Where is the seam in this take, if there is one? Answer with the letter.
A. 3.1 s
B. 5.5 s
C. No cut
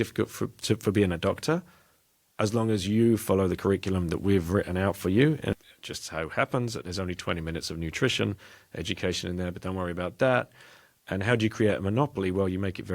B